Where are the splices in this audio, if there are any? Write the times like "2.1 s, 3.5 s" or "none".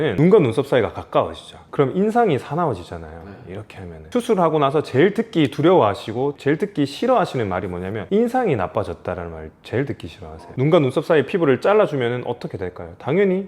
4.1 s

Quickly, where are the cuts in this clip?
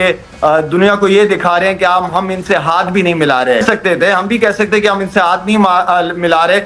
3.6 s

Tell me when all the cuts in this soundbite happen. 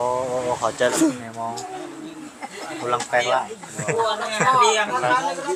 0.9 s

